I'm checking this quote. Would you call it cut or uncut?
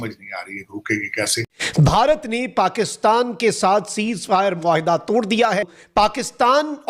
cut